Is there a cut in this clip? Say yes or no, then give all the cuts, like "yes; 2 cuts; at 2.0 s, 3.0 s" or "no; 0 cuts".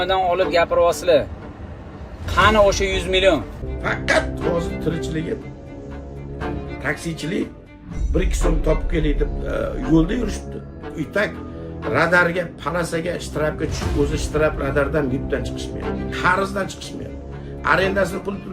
yes; 1 cut; at 3.6 s